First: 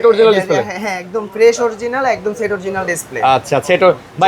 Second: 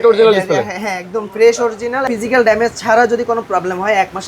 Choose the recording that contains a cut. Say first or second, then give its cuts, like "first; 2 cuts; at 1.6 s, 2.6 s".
second; 1 cut; at 2.0 s